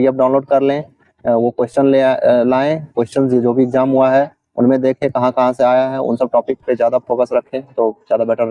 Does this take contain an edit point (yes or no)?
no